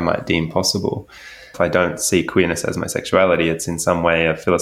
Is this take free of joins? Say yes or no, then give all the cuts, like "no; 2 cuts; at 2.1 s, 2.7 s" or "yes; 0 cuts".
no; 1 cut; at 1.5 s